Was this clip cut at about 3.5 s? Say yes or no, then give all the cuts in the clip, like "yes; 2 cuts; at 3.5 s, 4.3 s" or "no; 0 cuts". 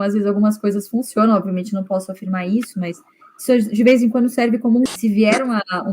no; 1 cut; at 4.9 s